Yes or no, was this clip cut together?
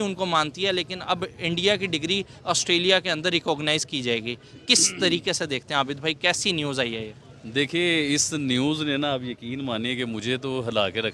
no